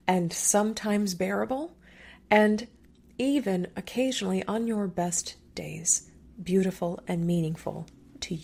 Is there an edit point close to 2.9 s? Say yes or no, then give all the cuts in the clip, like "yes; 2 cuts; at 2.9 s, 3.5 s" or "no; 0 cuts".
no; 0 cuts